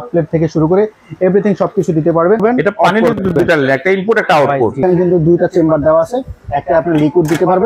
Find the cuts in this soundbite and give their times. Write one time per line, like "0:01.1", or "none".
0:02.4
0:04.8